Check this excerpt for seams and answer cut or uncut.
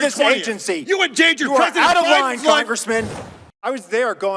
cut